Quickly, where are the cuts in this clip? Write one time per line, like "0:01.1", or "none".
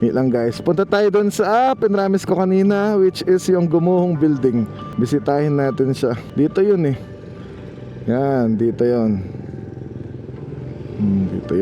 0:04.8
0:06.2